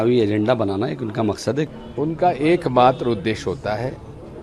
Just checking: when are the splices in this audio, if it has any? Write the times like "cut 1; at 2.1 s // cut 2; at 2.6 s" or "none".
cut 1; at 1.7 s